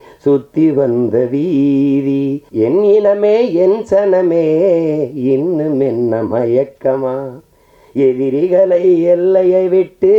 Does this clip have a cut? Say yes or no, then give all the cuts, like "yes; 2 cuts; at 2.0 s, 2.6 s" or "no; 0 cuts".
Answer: yes; 1 cut; at 2.4 s